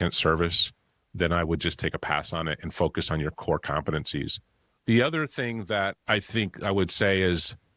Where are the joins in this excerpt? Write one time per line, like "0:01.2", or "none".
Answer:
none